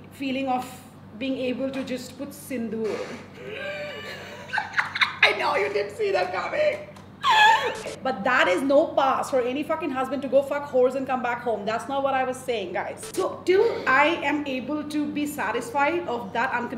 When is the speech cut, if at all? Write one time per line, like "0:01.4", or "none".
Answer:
0:07.9
0:13.0